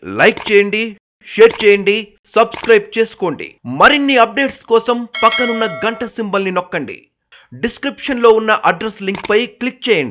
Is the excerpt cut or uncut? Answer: uncut